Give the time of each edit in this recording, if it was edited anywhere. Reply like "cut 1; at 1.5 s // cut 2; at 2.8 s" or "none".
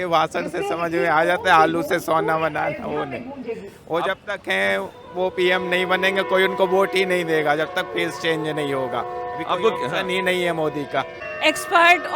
cut 1; at 11.2 s